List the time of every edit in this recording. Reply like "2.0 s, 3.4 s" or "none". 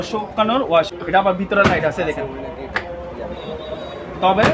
0.9 s